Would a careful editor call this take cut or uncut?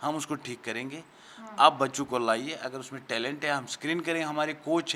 uncut